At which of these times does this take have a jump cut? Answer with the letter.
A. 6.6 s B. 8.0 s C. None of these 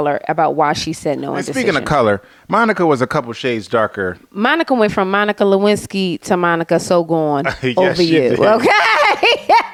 C